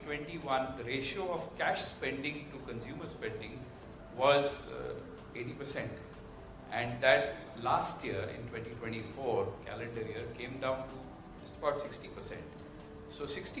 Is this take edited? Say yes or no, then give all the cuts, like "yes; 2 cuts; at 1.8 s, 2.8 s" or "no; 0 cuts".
no; 0 cuts